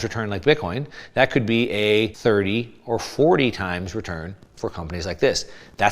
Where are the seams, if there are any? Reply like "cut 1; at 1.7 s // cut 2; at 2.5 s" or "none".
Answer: cut 1; at 2.1 s